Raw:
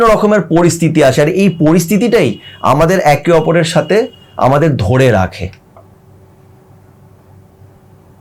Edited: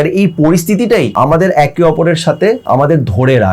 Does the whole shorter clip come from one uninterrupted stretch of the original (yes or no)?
no